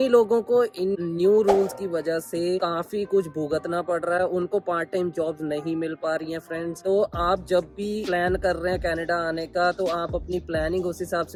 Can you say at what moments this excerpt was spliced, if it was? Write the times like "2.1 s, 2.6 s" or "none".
none